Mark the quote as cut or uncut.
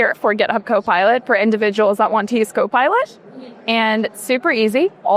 uncut